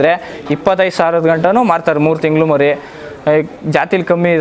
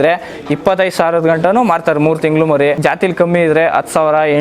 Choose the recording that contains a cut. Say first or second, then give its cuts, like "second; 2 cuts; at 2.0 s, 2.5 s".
second; 1 cut; at 2.8 s